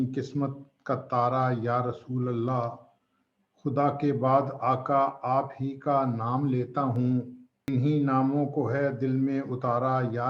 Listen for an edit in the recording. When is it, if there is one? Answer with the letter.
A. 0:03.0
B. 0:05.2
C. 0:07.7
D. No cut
C